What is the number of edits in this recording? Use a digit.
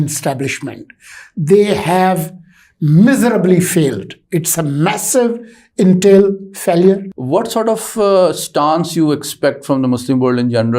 1